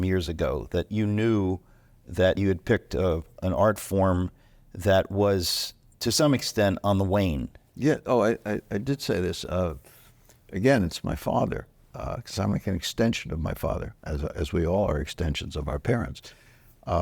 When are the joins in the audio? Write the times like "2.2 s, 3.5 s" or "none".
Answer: 0.9 s, 2.4 s